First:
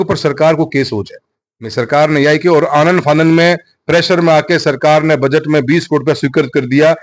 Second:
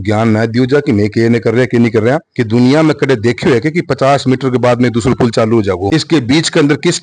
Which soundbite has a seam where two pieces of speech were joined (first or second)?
second